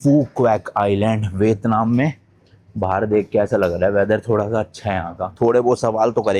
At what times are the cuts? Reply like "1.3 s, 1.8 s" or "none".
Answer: 5.2 s